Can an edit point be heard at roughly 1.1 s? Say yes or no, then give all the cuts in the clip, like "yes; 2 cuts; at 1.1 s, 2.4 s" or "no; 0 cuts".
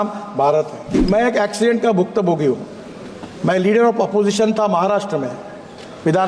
yes; 1 cut; at 1.1 s